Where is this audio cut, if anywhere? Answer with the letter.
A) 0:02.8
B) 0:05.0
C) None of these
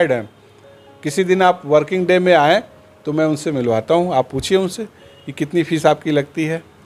C